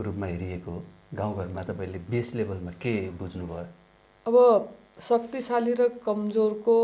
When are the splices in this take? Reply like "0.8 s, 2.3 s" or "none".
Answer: none